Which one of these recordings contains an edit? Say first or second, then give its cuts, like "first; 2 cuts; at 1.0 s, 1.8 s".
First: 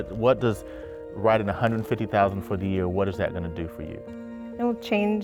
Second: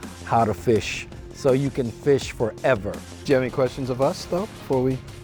second; 1 cut; at 3.1 s